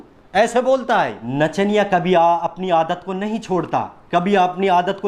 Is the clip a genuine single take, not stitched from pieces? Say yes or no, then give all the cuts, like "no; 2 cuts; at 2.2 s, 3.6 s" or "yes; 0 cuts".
no; 1 cut; at 1.2 s